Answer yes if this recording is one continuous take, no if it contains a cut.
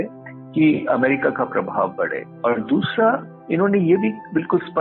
no